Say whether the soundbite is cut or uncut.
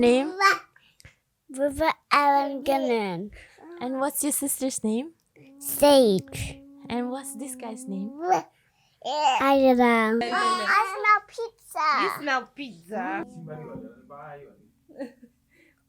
cut